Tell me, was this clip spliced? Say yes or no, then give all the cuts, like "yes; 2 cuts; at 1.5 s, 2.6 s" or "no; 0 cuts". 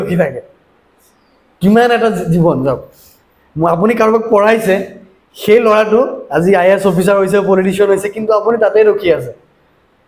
no; 0 cuts